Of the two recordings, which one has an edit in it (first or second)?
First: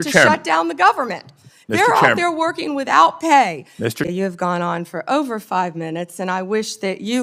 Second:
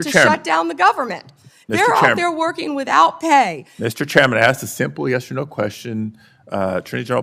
first